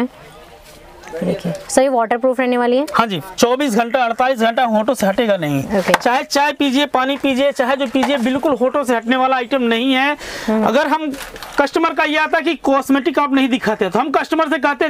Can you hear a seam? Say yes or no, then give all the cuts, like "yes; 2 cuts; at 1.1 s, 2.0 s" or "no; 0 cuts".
no; 0 cuts